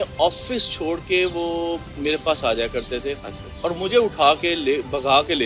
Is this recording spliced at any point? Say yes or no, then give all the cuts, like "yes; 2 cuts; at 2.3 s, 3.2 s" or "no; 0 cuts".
no; 0 cuts